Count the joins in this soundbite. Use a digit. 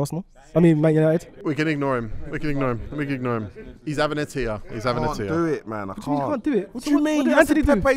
1